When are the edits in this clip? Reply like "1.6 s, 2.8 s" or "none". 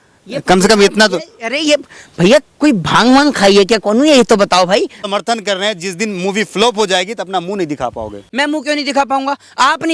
5.0 s, 8.2 s